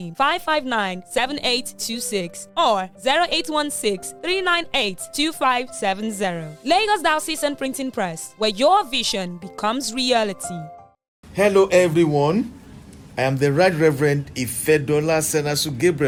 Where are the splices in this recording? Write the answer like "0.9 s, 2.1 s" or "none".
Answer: none